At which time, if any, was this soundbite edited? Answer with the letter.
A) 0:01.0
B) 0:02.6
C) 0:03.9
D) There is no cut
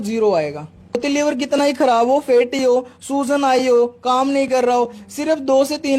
A